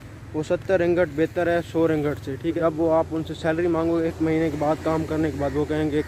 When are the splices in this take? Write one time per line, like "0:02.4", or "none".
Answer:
0:02.6